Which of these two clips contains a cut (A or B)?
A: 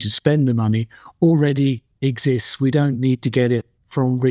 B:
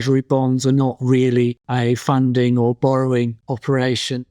B